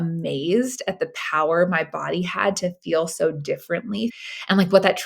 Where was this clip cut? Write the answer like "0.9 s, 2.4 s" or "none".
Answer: 4.2 s